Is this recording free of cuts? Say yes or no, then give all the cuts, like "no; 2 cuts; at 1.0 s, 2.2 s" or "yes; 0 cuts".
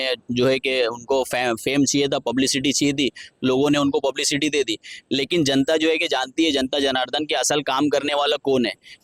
yes; 0 cuts